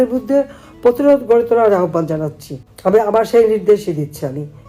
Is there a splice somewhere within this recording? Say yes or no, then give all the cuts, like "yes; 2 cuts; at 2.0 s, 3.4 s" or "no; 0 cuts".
no; 0 cuts